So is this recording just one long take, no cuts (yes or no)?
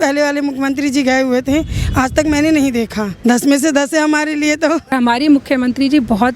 no